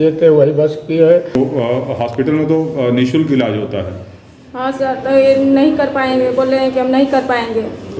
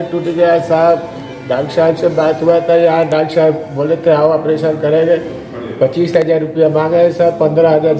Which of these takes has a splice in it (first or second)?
first